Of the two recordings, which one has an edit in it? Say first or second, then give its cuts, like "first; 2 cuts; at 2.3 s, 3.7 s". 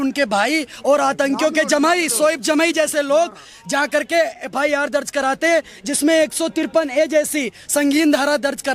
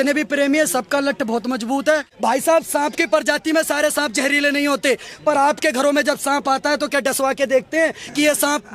second; 1 cut; at 2.1 s